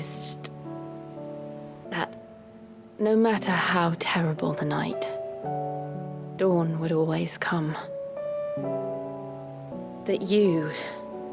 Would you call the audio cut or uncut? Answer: cut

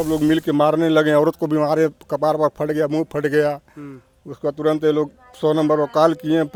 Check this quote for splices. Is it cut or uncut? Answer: uncut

